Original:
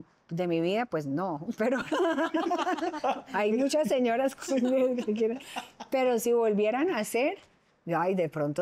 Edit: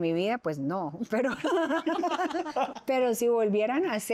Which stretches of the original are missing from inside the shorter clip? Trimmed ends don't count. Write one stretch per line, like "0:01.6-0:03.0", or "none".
0:03.2-0:05.8